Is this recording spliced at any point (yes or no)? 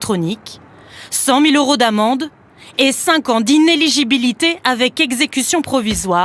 no